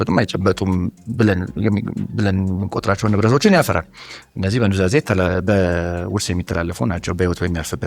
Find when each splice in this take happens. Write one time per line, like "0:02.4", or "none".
none